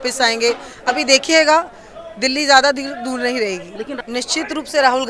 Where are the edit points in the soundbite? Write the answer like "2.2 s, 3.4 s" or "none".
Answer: 3.9 s